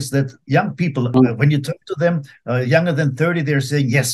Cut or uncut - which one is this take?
cut